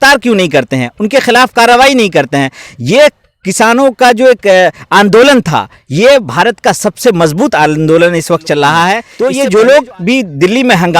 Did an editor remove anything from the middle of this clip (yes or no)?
yes